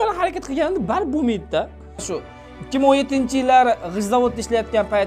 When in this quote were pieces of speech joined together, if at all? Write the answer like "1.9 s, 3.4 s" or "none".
2.1 s